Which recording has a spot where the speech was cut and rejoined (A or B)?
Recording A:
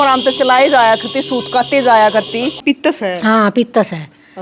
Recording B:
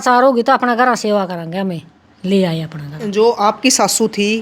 A